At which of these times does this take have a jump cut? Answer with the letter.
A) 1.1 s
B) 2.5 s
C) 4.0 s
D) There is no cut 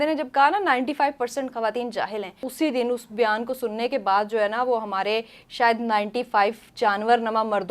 B